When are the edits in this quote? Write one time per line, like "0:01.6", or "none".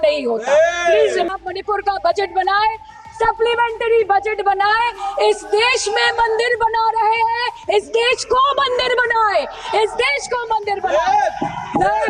0:01.3